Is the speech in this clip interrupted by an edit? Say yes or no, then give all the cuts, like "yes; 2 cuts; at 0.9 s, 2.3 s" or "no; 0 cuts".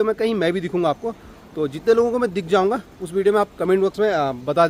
no; 0 cuts